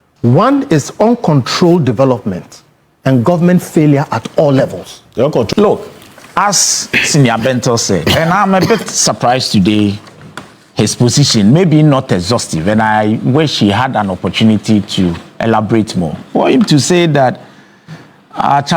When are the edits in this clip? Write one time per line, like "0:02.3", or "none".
0:05.5